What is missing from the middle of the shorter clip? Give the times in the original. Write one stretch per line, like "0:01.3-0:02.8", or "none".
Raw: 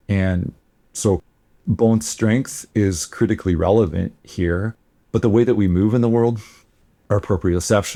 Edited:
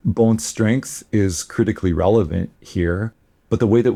none